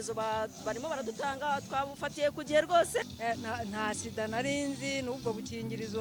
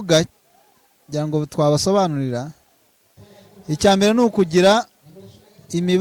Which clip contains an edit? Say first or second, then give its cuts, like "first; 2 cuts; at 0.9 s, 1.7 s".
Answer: first; 1 cut; at 3.1 s